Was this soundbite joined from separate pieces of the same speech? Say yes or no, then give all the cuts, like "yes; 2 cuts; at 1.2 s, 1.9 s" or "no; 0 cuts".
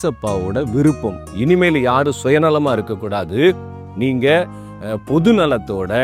yes; 1 cut; at 1.3 s